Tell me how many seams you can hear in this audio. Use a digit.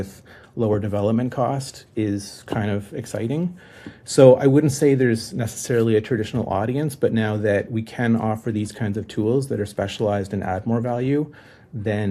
0